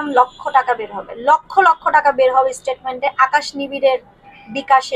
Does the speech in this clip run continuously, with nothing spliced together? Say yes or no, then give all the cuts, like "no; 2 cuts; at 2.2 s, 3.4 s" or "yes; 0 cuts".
yes; 0 cuts